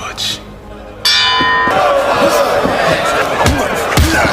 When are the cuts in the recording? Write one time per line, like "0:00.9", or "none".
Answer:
0:03.2